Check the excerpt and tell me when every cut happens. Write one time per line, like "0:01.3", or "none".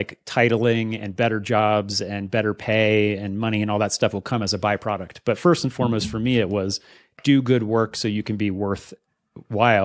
none